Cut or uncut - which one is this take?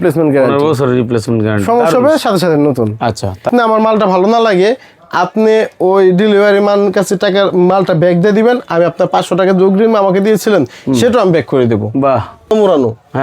cut